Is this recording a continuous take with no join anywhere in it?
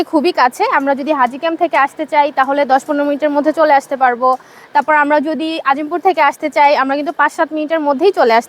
yes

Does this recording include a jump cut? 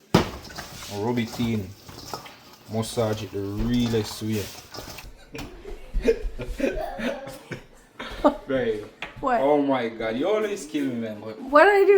yes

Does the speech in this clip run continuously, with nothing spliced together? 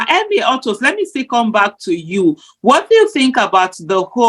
yes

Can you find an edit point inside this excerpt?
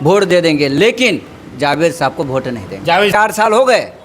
yes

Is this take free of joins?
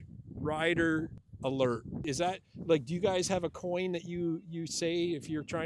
no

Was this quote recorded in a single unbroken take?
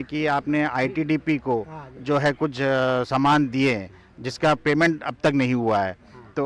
yes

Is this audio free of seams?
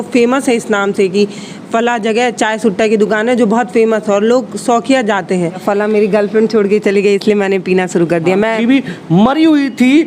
no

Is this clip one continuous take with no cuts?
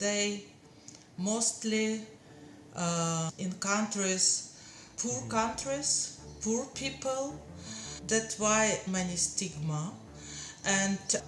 yes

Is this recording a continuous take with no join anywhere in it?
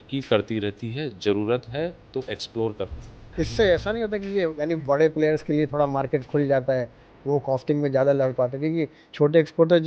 no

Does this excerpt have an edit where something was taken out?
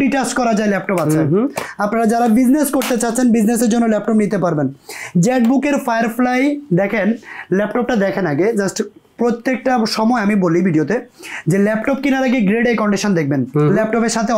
no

